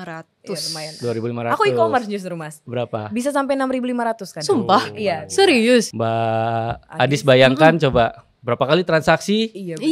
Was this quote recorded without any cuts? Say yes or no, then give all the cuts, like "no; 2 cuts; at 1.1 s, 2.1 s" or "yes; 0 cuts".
no; 2 cuts; at 2.6 s, 5.9 s